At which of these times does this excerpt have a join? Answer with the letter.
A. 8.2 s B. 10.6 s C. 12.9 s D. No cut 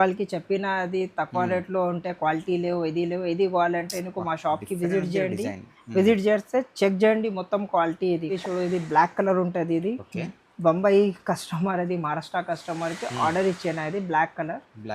A